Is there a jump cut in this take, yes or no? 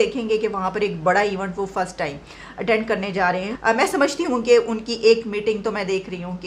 yes